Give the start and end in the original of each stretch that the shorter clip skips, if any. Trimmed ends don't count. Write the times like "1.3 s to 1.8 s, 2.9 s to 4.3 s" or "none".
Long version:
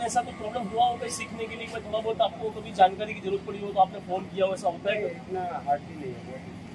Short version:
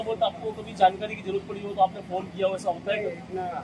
none